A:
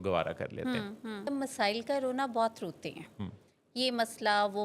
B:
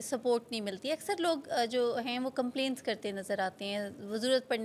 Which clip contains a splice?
A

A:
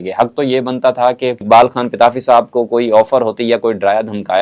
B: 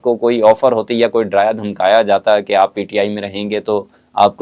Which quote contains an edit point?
A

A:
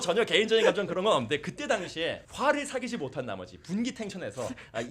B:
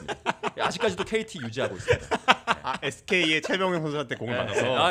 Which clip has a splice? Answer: A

